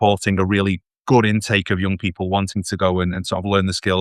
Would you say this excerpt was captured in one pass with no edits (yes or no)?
yes